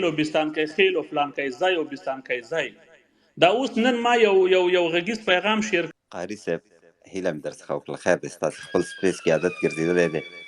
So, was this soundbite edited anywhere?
yes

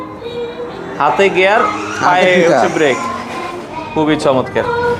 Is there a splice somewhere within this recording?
no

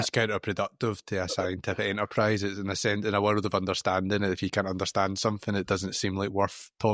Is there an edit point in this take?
no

